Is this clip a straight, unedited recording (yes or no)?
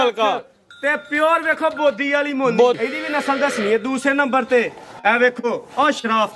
no